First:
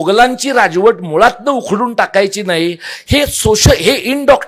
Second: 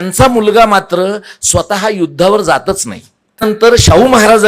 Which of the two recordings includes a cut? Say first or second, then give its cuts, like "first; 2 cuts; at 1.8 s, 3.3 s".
second; 1 cut; at 3.6 s